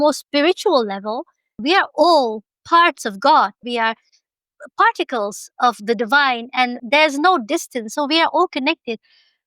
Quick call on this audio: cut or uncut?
cut